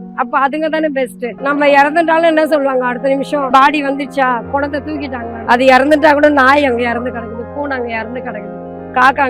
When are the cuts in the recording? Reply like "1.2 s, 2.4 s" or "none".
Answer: 1.4 s, 3.5 s, 5.4 s